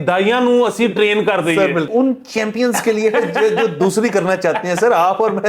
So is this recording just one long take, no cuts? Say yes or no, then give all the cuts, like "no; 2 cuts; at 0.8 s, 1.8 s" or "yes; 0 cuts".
no; 1 cut; at 1.9 s